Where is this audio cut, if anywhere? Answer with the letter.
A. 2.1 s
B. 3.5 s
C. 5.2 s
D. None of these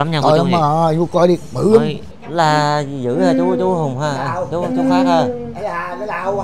A